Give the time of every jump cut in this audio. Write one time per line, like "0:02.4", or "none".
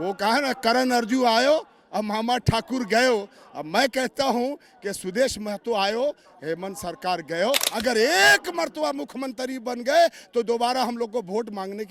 0:07.7